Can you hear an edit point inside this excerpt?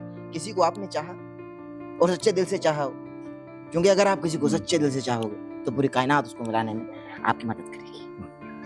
no; 0 cuts

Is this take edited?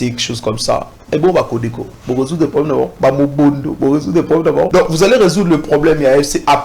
yes; 2 cuts; at 2.9 s, 4.7 s

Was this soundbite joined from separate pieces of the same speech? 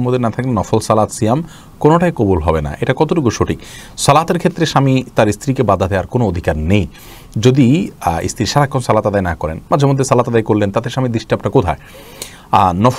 no; 0 cuts

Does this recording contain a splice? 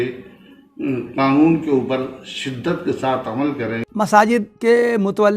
yes; 2 cuts; at 3.8 s, 4.5 s

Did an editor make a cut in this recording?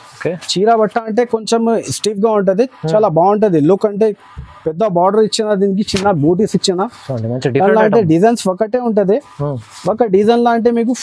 no; 0 cuts

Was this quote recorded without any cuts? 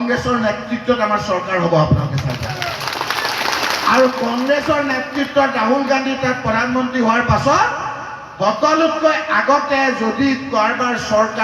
yes; 0 cuts

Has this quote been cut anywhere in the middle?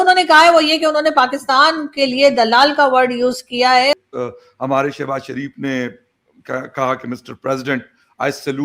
yes; 1 cut; at 3.9 s

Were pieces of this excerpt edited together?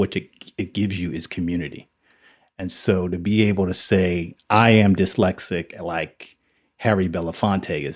no; 0 cuts

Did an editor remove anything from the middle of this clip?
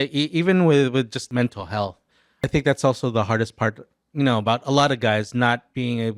yes; 2 cuts; at 1.2 s, 2.5 s

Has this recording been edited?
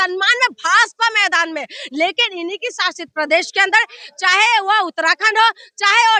no; 0 cuts

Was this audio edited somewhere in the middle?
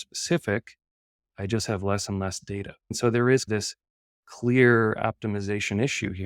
yes; 1 cut; at 2.9 s

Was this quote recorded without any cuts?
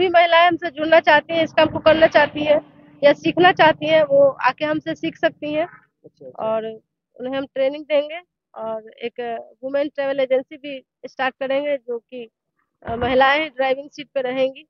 yes; 0 cuts

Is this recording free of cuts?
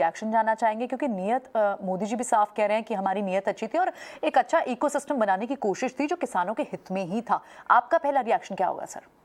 yes; 0 cuts

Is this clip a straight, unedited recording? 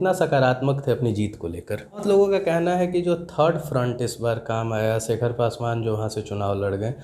no; 1 cut; at 2.0 s

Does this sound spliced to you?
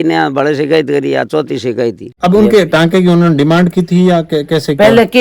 yes; 1 cut; at 2.1 s

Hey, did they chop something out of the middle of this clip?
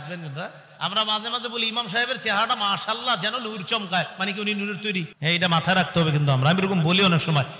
yes; 1 cut; at 5.1 s

